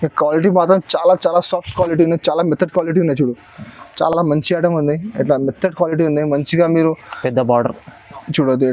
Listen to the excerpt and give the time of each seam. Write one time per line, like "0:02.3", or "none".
none